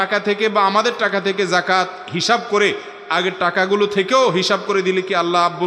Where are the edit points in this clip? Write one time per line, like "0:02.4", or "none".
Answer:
none